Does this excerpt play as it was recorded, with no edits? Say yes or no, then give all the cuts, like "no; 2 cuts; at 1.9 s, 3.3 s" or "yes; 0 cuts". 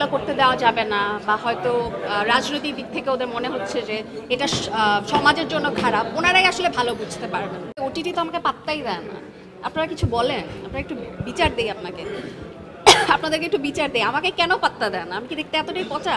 no; 1 cut; at 7.7 s